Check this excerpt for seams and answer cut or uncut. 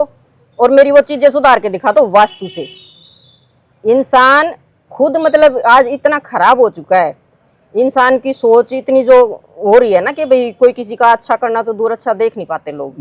uncut